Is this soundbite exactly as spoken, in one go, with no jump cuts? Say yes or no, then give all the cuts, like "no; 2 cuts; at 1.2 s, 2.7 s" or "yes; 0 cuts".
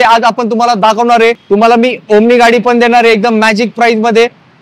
no; 1 cut; at 1.4 s